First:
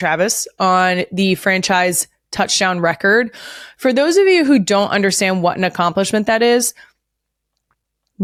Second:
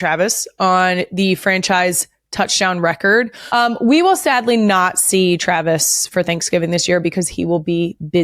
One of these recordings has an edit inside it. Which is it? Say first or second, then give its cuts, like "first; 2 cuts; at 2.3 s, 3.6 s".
second; 1 cut; at 3.4 s